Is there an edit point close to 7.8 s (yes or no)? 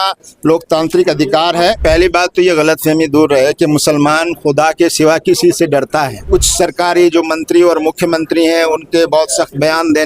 no